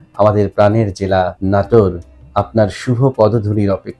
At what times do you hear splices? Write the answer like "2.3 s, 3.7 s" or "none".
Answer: 1.4 s